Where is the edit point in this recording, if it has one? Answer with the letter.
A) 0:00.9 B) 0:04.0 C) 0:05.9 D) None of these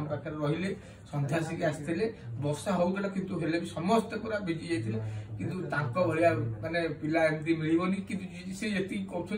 D